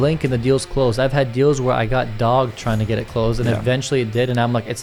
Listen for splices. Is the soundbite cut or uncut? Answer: uncut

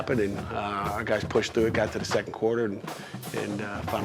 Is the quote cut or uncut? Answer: uncut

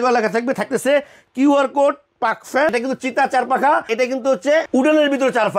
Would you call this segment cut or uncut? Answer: cut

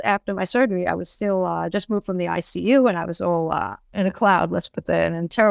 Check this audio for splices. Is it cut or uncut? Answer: cut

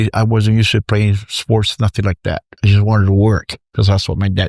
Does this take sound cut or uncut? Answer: cut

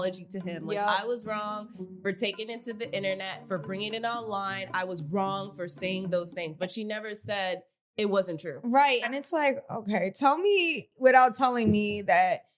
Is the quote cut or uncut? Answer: cut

